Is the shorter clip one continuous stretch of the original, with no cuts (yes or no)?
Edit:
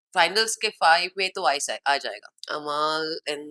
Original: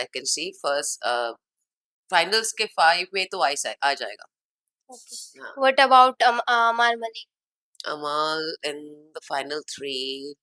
no